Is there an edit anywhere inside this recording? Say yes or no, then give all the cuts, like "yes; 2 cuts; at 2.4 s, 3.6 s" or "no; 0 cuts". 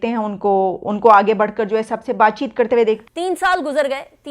yes; 1 cut; at 3.0 s